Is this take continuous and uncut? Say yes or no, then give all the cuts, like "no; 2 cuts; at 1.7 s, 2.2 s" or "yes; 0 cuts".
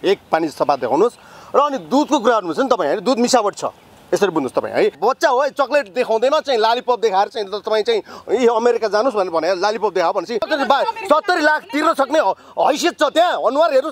no; 2 cuts; at 5.0 s, 10.5 s